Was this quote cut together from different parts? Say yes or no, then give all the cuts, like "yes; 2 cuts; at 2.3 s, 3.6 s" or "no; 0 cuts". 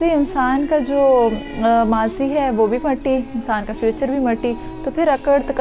no; 0 cuts